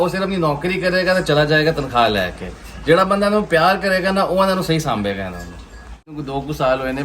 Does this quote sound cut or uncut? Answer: cut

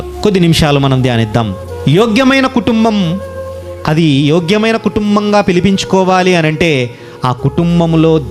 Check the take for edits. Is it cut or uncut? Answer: uncut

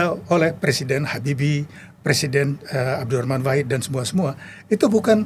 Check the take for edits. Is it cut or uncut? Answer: uncut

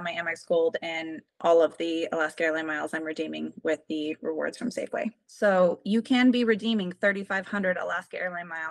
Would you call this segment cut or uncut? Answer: cut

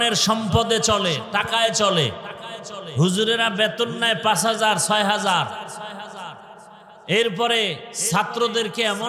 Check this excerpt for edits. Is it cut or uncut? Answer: uncut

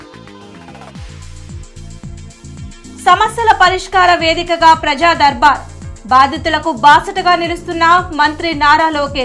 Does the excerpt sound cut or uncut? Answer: cut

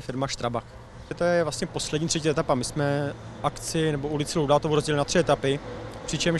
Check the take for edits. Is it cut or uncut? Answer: cut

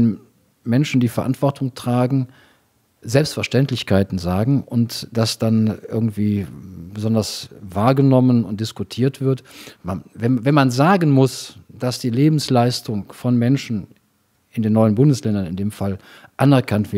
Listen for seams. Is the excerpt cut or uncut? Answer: uncut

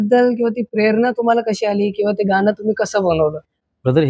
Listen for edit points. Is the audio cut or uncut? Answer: uncut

